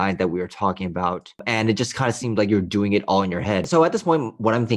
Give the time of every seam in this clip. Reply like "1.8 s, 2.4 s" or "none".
1.4 s, 3.7 s